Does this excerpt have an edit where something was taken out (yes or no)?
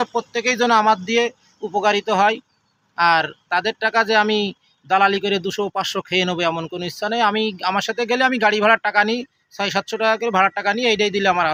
no